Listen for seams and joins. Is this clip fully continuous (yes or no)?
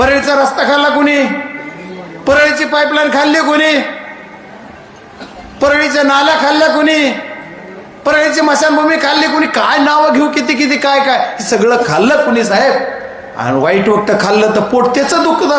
yes